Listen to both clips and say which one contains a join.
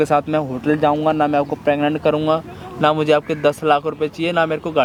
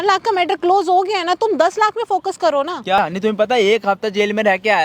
second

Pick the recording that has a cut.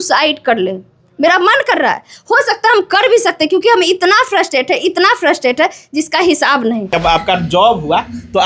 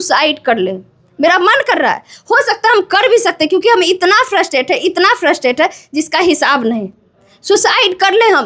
first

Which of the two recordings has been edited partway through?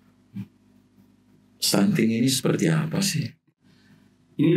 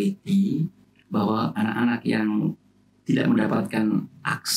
first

